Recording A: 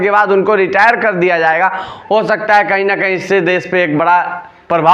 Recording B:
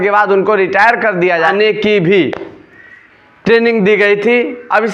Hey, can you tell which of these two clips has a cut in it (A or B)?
B